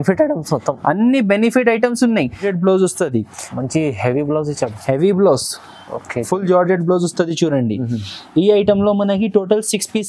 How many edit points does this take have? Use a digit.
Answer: 1